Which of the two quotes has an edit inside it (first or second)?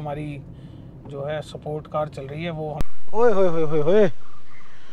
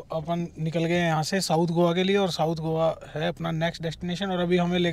first